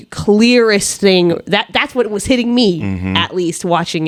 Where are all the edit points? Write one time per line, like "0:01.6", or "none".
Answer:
none